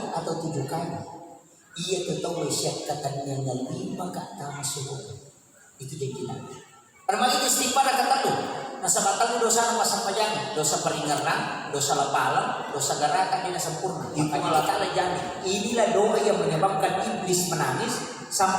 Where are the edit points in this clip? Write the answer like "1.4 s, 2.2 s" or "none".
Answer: 7.1 s, 14.0 s